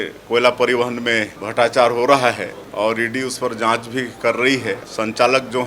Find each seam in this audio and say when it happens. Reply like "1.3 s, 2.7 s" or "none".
1.4 s, 2.6 s, 4.8 s